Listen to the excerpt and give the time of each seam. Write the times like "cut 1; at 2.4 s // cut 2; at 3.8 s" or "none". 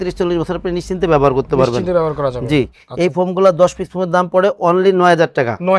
none